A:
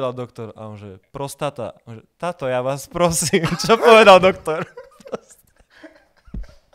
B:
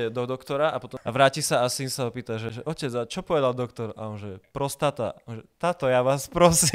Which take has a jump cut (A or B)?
B